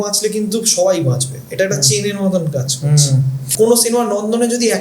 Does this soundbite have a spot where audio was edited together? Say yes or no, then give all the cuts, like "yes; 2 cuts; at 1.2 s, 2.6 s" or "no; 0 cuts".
yes; 1 cut; at 3.4 s